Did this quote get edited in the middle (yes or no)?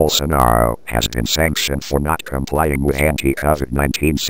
no